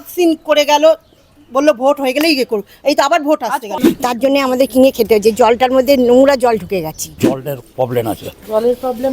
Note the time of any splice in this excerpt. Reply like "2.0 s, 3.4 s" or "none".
3.7 s, 7.5 s